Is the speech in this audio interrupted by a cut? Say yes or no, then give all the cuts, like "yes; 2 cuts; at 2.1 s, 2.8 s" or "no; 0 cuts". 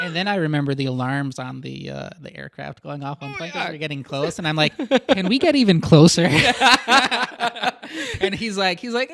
no; 0 cuts